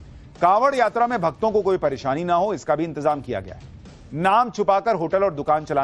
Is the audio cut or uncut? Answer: cut